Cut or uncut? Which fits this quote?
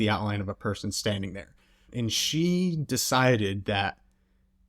cut